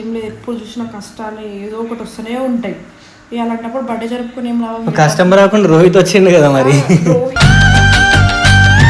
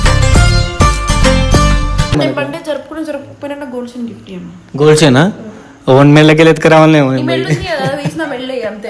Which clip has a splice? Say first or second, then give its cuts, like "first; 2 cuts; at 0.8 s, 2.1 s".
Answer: second; 1 cut; at 2.1 s